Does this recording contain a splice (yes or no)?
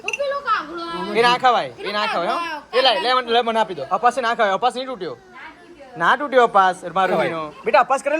yes